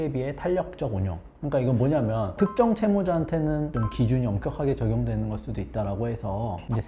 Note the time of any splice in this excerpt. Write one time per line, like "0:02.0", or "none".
0:02.3
0:03.7